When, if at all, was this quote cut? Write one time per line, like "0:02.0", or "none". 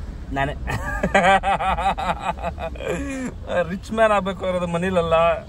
none